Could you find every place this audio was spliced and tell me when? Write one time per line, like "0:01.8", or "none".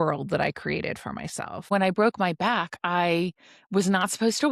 0:01.7